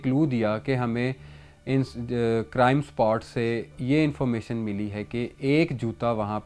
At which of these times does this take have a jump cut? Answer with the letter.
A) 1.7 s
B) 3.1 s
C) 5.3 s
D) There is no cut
D